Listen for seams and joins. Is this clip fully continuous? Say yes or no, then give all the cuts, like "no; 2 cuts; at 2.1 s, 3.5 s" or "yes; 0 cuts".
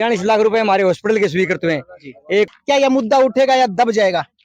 no; 1 cut; at 2.5 s